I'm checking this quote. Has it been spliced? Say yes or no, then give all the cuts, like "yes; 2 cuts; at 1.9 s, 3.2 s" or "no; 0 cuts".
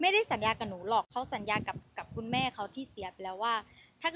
yes; 1 cut; at 1.1 s